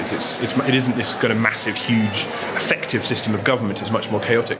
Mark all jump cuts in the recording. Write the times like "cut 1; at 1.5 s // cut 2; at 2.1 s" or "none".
cut 1; at 2.4 s